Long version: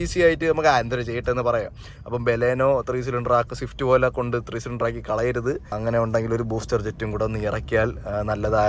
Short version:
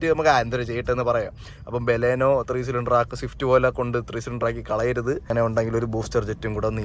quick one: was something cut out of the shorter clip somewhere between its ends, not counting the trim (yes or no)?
yes